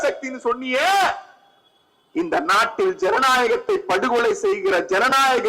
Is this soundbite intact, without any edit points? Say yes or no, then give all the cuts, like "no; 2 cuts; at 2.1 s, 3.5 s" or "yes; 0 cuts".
yes; 0 cuts